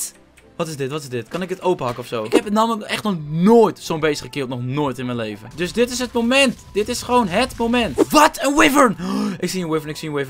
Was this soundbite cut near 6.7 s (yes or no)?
no